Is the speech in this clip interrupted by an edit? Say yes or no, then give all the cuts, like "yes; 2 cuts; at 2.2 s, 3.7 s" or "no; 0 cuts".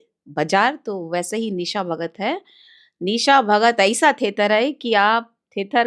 no; 0 cuts